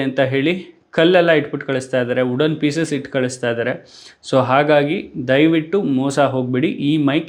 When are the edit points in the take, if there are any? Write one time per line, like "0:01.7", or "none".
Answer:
none